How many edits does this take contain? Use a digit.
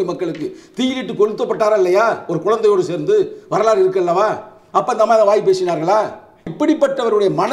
1